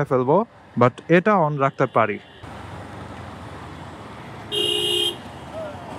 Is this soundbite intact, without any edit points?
no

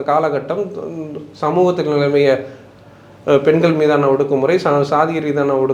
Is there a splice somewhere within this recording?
no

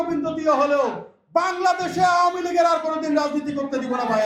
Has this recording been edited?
no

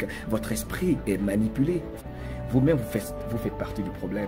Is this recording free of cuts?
no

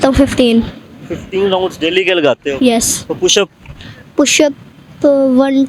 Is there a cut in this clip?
no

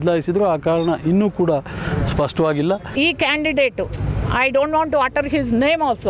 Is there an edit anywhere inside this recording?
yes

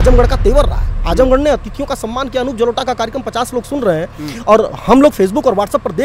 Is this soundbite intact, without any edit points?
yes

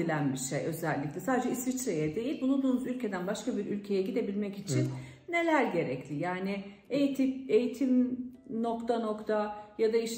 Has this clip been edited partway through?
no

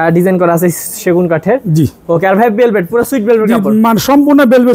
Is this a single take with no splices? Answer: yes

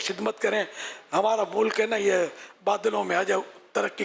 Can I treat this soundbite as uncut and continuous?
yes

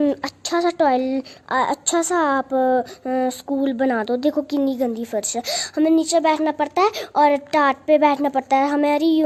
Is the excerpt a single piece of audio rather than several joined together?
yes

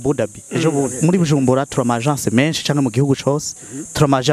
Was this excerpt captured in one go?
no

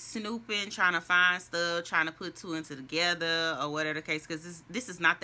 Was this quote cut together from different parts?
no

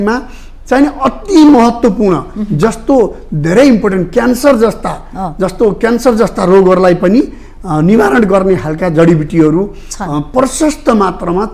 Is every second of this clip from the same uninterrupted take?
yes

